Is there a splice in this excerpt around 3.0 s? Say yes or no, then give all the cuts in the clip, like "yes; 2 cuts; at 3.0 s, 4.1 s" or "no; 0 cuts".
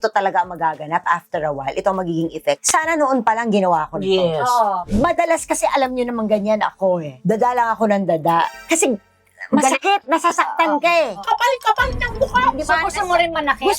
no; 3 cuts; at 4.9 s, 8.5 s, 11.2 s